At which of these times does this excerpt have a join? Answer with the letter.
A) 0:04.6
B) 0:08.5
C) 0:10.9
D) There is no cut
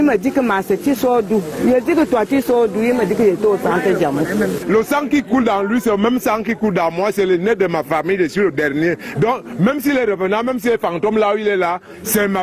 A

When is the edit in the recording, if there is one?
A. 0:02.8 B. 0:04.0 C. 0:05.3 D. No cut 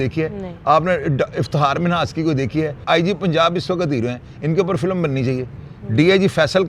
A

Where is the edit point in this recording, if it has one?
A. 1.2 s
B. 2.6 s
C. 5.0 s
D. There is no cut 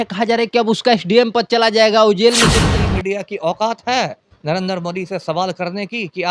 B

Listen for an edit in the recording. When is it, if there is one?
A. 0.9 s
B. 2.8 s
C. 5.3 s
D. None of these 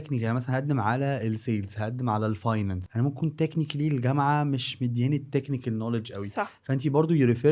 B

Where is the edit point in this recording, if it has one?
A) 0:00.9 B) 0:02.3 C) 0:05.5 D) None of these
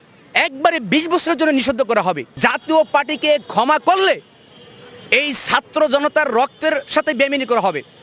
B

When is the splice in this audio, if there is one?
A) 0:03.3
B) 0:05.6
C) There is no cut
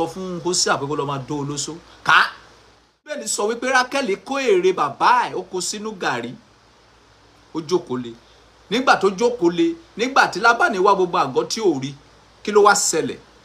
A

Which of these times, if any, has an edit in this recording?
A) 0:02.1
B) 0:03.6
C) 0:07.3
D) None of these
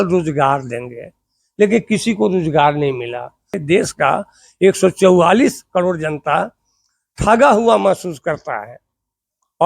B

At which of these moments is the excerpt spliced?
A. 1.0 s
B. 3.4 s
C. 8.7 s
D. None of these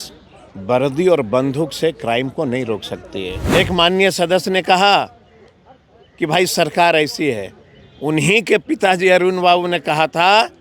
B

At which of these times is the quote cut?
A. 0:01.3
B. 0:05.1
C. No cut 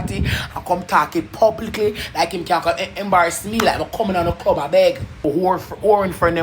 B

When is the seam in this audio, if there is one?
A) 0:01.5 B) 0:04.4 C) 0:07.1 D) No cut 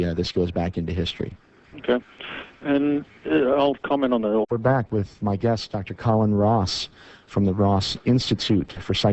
D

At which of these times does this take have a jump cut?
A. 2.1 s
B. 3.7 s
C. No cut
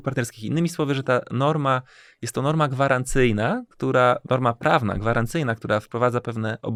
C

